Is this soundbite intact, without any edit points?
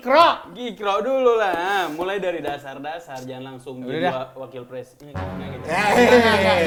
yes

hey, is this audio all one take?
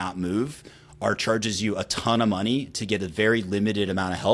yes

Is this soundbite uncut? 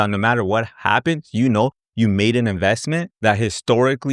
yes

